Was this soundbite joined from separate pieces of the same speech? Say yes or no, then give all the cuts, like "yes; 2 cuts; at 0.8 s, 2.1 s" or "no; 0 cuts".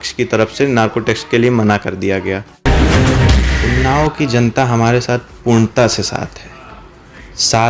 yes; 2 cuts; at 2.5 s, 3.6 s